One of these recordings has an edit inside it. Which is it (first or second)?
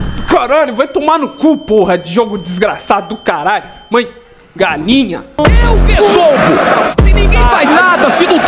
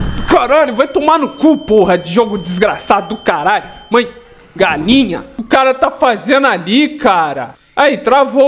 first